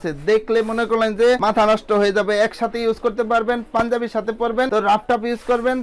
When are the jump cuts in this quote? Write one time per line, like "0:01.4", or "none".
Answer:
none